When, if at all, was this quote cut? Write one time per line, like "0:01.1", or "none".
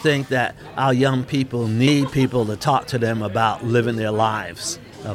0:01.9

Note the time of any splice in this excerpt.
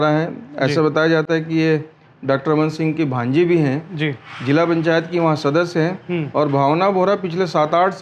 none

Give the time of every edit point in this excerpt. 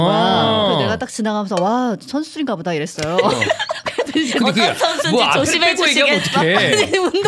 none

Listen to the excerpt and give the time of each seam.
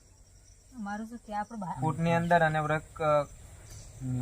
0:01.6

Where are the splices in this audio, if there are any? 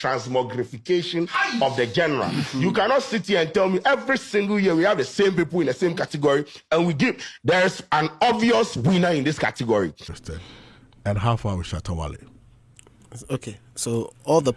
0:10.1

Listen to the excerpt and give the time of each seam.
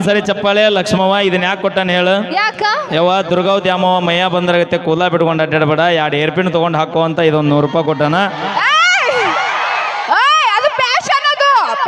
none

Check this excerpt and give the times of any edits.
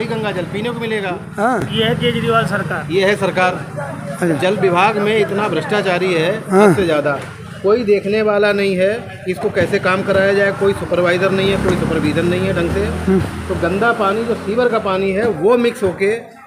none

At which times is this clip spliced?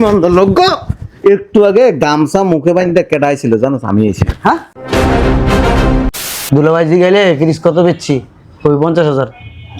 0:06.3

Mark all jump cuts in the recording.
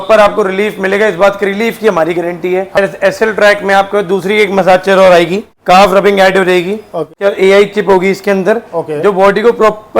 0:02.8
0:05.5
0:07.1

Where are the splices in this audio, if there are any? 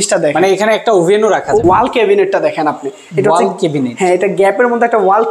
0:01.6

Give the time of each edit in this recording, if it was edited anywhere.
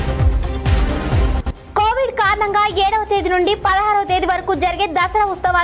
0:01.4

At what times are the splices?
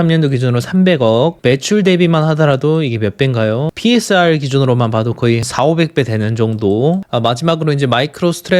0:01.4
0:05.5
0:07.1

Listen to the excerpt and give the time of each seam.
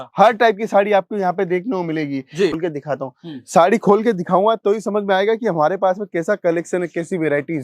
0:02.5

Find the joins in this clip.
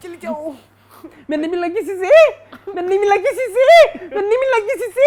none

